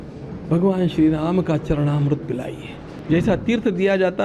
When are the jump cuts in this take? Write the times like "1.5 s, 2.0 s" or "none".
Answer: 2.9 s